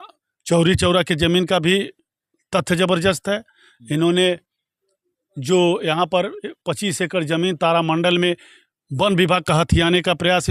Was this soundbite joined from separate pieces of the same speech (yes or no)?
no